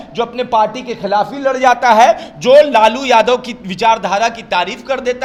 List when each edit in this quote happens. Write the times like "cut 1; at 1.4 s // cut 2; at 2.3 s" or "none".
none